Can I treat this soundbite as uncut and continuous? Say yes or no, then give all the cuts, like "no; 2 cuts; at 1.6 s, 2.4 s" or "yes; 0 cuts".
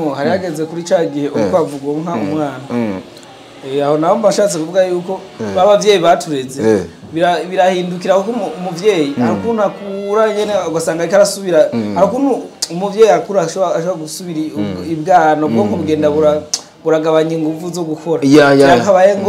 yes; 0 cuts